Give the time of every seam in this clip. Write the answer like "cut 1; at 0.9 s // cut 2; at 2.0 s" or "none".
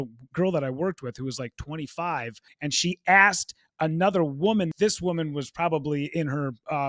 cut 1; at 2.4 s // cut 2; at 4.7 s